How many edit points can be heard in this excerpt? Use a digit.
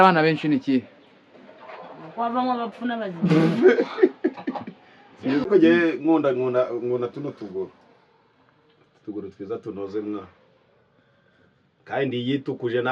1